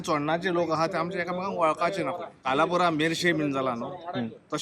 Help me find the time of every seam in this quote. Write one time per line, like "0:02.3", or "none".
0:02.4

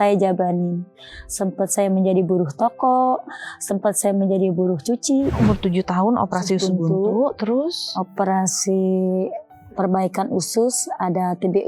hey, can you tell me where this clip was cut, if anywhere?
0:05.4

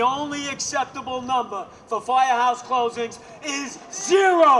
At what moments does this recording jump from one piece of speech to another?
none

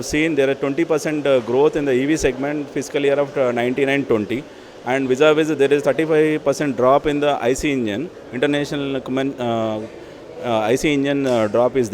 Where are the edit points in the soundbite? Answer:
none

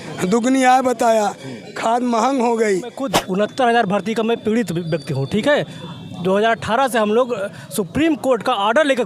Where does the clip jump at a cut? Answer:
0:03.1

